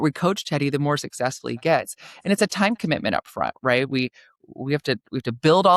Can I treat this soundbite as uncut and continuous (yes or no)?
yes